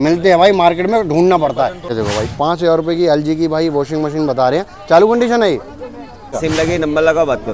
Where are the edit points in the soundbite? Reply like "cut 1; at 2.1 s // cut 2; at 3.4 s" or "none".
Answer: cut 1; at 1.8 s // cut 2; at 6.4 s